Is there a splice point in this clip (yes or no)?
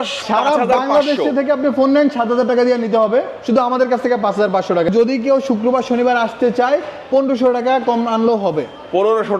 yes